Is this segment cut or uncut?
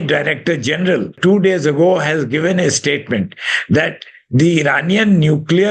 cut